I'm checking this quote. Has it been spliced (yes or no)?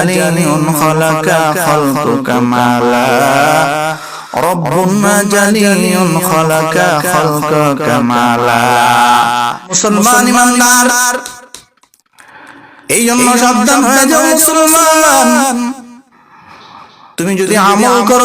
yes